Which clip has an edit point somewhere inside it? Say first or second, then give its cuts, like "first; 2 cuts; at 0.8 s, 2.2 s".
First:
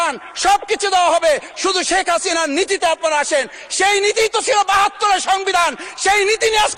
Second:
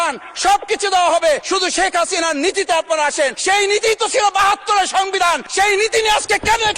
second; 3 cuts; at 1.4 s, 3.4 s, 5.5 s